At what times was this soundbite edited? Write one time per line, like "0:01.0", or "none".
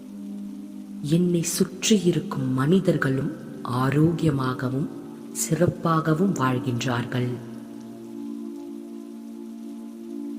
0:01.0
0:07.3
0:09.5